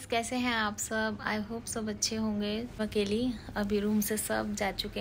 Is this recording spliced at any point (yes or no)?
yes